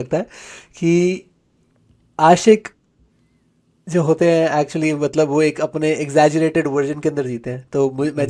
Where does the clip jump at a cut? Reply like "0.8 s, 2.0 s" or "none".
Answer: none